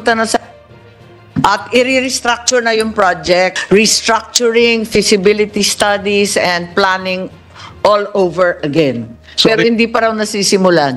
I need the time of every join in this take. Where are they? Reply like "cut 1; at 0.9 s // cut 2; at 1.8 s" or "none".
cut 1; at 3.6 s

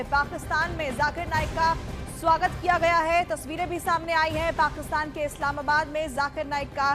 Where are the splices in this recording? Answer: none

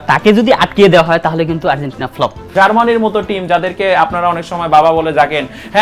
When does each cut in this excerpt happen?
cut 1; at 2.5 s

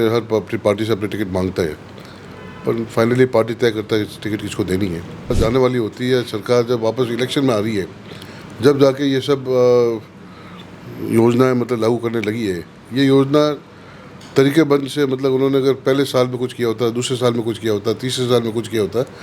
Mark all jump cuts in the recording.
cut 1; at 5.4 s

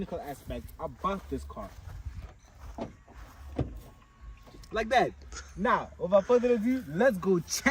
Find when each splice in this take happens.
none

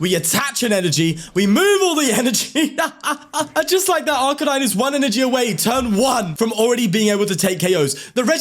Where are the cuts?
cut 1; at 3.5 s // cut 2; at 6.3 s

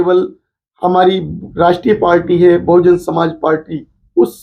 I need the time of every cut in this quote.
cut 1; at 1.4 s

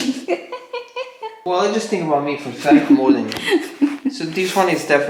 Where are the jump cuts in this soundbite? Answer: none

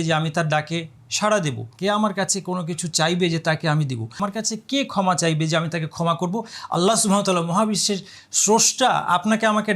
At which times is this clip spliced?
cut 1; at 1.7 s // cut 2; at 4.2 s

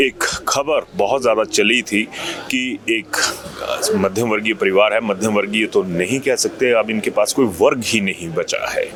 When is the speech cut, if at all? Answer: none

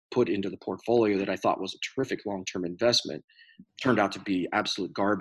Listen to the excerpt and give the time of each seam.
none

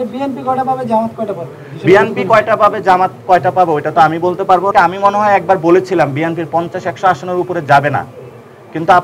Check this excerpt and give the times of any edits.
cut 1; at 4.7 s

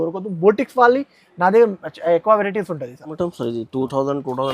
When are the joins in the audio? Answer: cut 1; at 3.1 s

